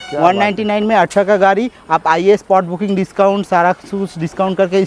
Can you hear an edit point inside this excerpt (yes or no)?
no